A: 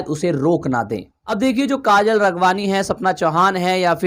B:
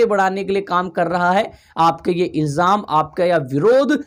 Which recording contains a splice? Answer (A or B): A